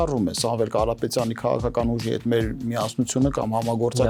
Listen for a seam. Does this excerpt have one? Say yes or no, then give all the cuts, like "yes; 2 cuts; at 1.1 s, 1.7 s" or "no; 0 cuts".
no; 0 cuts